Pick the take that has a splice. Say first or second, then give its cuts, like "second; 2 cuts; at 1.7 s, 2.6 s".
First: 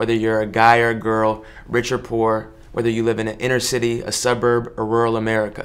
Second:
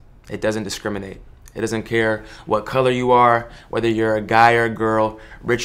first; 1 cut; at 4.1 s